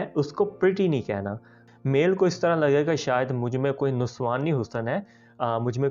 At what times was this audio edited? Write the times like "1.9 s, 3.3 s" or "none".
1.6 s